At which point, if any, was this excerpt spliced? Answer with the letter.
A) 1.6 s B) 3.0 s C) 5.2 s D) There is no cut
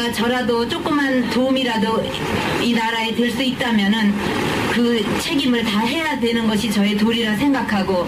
C